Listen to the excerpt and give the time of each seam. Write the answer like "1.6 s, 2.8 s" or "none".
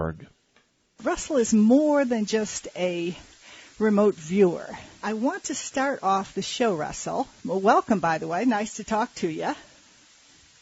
none

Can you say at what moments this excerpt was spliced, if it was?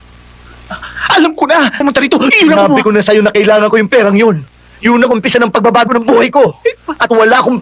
1.8 s

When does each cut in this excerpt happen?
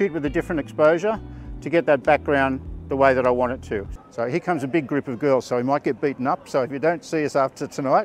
3.9 s

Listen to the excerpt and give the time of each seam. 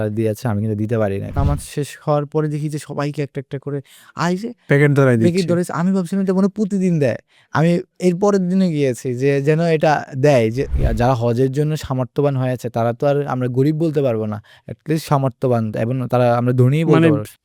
1.3 s, 10.8 s

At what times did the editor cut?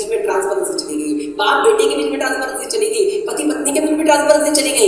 none

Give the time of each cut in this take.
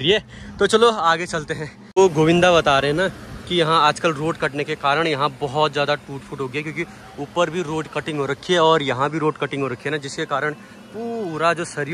2.0 s

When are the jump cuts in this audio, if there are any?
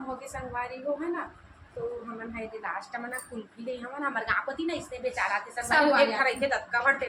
none

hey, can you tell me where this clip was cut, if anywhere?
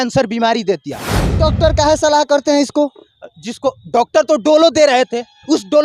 1.4 s

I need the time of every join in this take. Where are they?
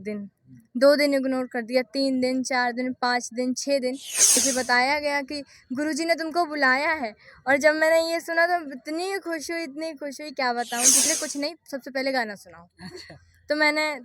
4.4 s, 11.1 s

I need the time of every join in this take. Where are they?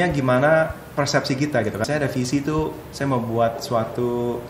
1.9 s

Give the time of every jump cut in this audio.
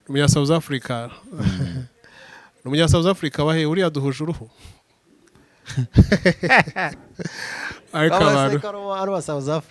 none

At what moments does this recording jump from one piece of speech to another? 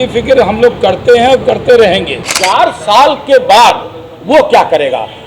2.3 s

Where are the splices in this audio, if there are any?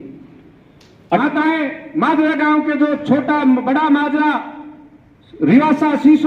1.2 s

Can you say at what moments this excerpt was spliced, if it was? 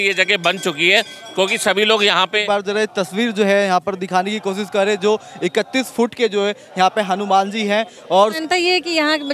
2.4 s, 8.4 s

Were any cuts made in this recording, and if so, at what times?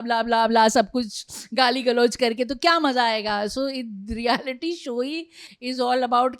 none

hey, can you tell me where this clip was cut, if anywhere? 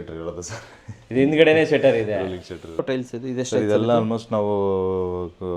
2.9 s

